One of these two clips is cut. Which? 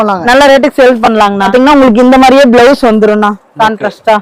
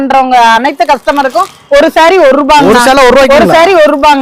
first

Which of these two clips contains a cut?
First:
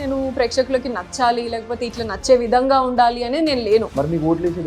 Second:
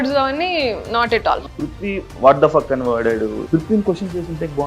second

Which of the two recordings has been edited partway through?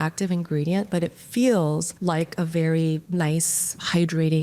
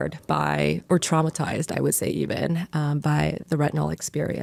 first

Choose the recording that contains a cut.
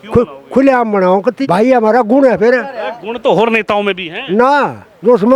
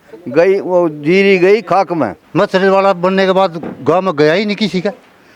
second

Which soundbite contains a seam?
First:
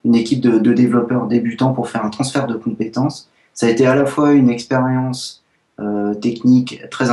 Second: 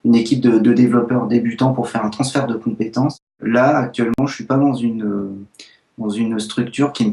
second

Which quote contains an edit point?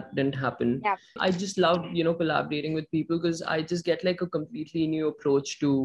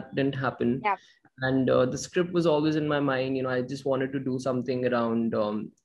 first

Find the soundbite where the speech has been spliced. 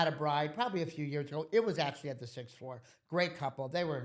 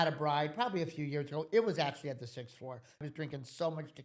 second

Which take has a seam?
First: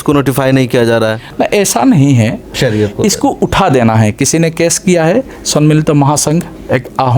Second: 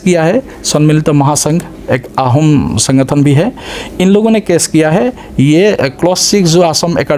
first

